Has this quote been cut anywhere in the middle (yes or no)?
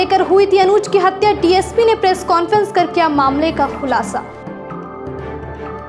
no